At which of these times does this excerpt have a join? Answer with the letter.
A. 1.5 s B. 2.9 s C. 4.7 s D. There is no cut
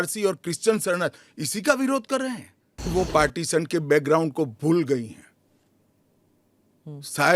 B